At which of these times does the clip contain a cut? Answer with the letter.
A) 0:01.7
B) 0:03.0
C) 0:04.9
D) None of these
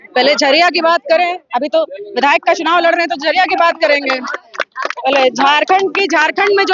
D